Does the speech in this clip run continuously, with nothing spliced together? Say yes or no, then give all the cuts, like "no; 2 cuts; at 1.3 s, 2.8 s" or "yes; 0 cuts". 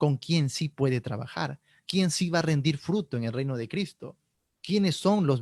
yes; 0 cuts